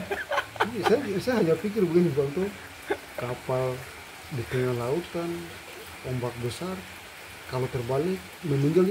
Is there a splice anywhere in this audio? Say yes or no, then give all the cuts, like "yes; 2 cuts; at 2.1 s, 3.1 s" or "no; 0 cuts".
no; 0 cuts